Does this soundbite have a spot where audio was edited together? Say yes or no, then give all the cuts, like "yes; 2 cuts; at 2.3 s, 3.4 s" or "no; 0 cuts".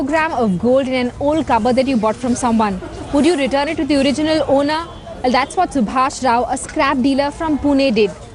yes; 1 cut; at 2.2 s